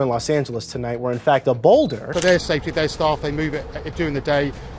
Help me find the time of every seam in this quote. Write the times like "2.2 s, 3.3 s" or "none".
2.0 s